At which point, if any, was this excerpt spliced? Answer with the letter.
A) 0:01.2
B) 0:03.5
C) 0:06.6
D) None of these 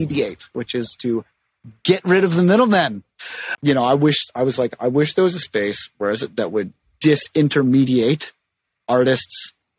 B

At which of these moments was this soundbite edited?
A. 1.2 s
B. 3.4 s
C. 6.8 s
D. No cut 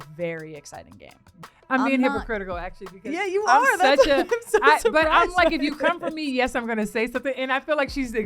A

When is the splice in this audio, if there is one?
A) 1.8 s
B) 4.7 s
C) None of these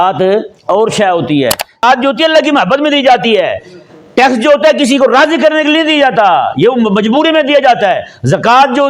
A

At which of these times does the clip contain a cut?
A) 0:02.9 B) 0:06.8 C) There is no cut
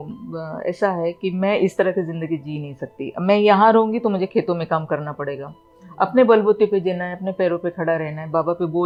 C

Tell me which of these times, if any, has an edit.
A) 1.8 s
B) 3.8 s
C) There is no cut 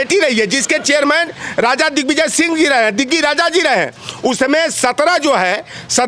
C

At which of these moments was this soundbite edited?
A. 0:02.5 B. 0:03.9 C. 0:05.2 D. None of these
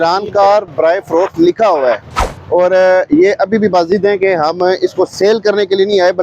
D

